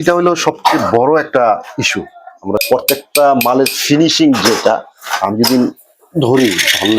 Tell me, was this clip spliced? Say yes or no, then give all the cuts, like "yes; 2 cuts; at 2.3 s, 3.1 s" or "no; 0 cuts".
yes; 1 cut; at 2.6 s